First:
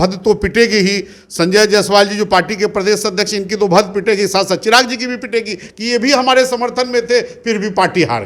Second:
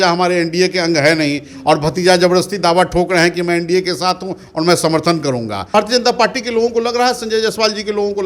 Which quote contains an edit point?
second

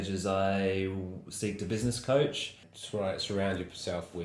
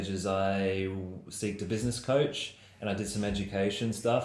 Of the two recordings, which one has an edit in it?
first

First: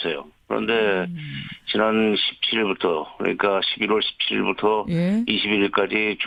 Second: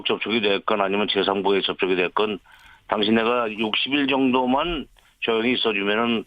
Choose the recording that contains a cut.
second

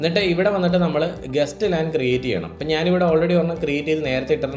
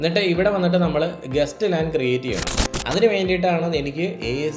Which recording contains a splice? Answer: second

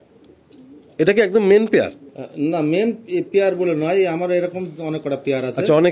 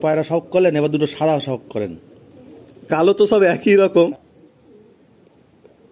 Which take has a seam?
second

